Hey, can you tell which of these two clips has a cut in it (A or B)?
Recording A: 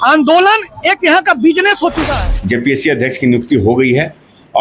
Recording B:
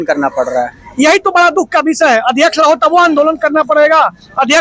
A